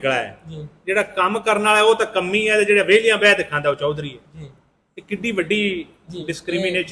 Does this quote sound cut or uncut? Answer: uncut